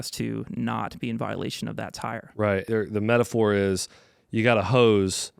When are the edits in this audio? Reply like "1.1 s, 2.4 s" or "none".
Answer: 2.7 s